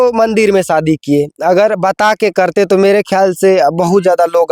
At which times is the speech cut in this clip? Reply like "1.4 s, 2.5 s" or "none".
none